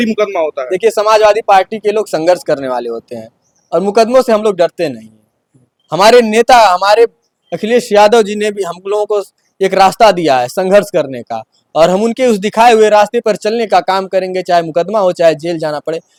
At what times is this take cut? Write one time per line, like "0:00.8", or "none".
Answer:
none